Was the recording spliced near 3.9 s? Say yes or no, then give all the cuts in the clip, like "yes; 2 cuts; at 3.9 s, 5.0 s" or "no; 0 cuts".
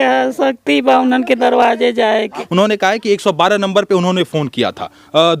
no; 1 cut; at 2.3 s